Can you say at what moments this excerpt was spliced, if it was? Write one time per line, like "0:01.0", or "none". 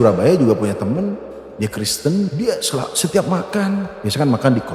0:02.3